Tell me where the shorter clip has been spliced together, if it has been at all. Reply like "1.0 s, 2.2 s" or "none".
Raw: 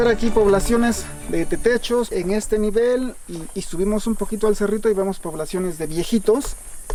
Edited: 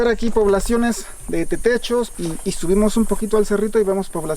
2.1 s